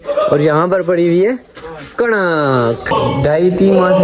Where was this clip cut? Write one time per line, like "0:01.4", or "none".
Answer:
0:02.9